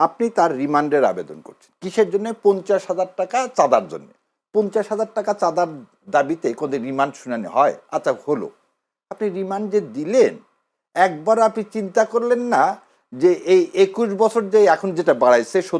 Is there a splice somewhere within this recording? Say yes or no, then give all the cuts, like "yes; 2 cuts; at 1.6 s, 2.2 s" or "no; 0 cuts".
no; 0 cuts